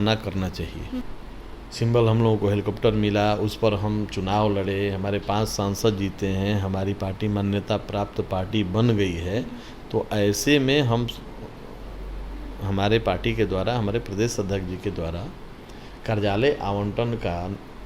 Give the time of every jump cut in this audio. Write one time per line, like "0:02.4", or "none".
0:01.0